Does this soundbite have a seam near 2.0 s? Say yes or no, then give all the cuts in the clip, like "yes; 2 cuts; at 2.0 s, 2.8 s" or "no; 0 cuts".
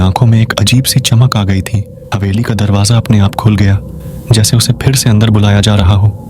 yes; 1 cut; at 2.0 s